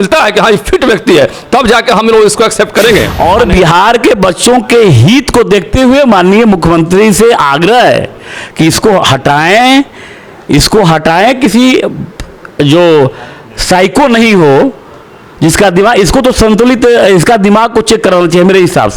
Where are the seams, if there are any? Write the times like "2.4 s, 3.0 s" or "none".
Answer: 3.1 s